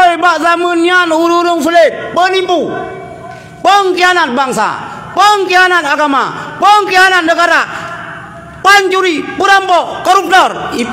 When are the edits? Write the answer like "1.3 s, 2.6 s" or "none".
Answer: none